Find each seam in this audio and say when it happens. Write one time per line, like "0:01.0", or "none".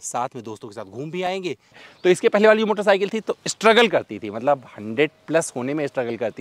0:01.9